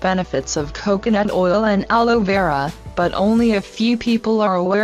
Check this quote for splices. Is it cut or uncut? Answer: cut